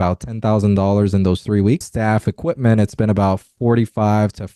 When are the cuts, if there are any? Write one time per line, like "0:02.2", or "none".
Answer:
0:01.9